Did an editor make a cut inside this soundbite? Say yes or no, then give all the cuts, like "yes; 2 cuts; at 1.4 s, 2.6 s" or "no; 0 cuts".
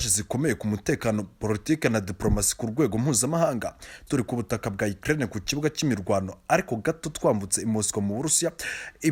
no; 0 cuts